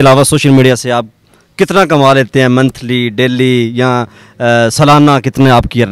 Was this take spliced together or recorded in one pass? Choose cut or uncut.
uncut